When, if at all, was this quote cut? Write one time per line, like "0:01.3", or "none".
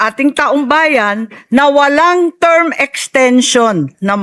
none